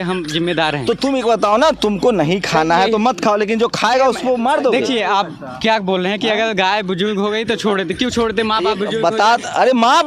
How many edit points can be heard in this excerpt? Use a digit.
0